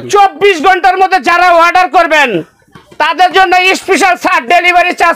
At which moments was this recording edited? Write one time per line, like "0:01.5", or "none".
none